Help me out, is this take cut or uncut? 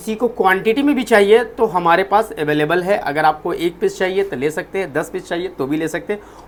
uncut